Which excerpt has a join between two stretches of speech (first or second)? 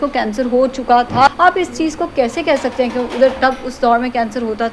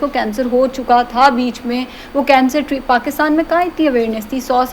first